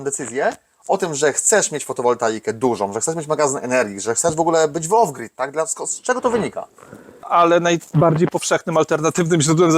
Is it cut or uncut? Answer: cut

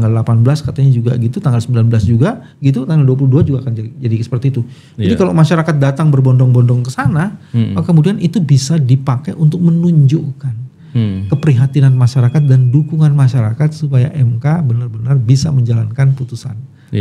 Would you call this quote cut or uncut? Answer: uncut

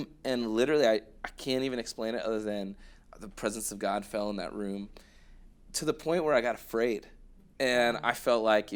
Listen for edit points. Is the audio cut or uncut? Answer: uncut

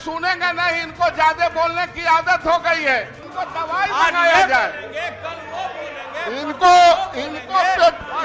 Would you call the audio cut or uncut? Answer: cut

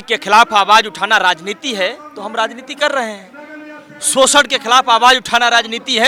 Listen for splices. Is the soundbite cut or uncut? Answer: uncut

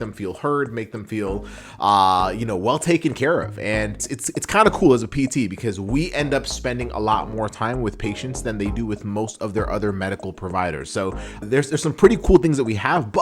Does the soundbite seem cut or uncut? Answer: cut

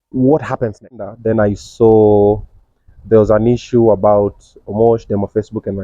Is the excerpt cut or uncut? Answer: cut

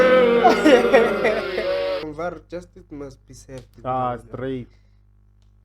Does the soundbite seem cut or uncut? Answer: cut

